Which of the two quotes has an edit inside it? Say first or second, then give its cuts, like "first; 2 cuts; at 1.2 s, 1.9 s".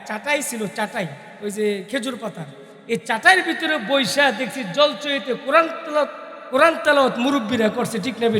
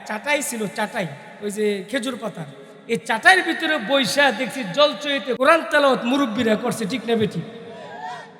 second; 1 cut; at 5.4 s